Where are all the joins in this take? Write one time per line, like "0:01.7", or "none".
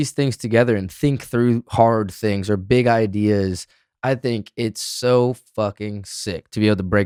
none